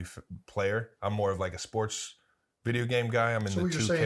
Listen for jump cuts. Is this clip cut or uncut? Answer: uncut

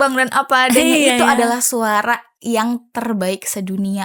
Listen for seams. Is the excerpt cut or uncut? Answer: uncut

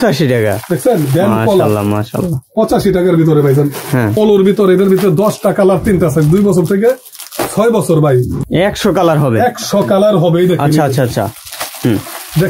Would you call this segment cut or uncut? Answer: cut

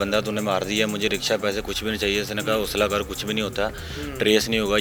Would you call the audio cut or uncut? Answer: uncut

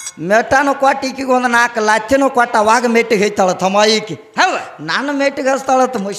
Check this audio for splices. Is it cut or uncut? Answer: uncut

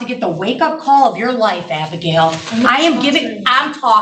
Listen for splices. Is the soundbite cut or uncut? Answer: uncut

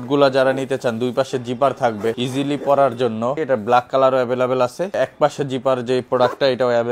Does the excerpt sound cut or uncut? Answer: cut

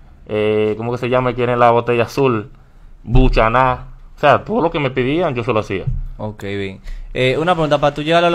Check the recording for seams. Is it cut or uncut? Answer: uncut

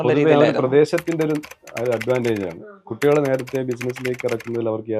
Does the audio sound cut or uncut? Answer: uncut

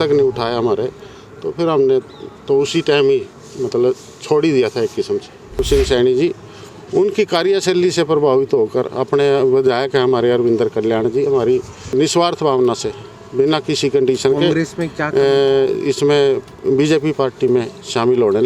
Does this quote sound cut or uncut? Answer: cut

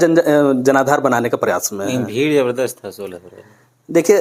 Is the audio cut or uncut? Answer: uncut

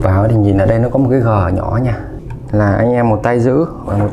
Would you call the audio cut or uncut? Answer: cut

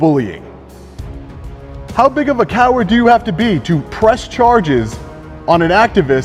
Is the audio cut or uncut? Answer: uncut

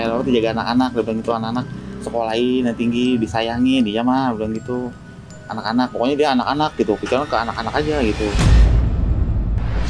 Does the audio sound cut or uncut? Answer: cut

